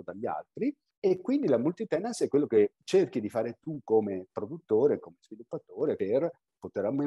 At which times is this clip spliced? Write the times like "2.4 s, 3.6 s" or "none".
0.9 s, 2.8 s, 6.0 s